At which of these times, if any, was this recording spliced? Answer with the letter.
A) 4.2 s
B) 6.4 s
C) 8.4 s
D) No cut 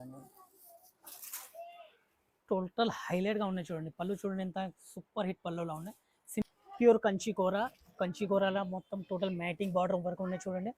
B